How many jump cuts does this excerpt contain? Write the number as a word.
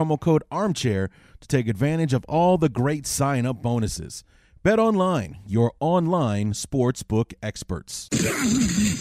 one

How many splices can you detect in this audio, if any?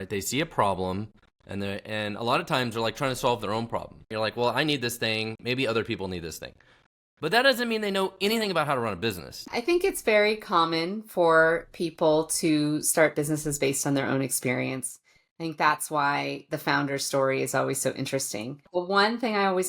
three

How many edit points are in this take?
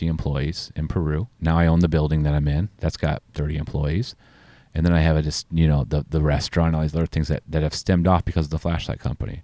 two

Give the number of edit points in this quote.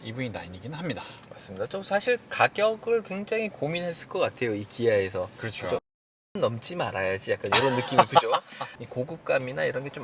one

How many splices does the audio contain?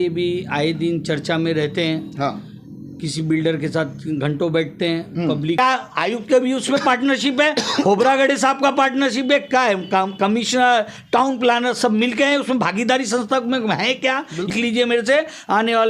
two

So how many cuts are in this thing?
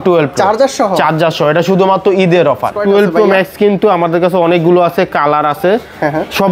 one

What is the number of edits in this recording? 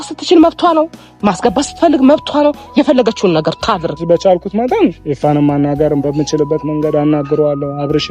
one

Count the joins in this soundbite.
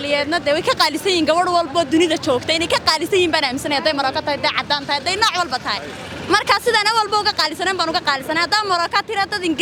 zero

